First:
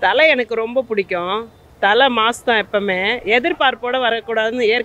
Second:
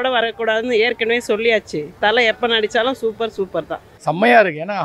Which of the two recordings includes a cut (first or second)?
second